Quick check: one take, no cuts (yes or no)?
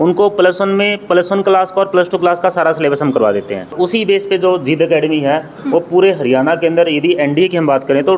no